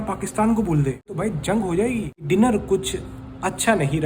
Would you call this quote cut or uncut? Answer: cut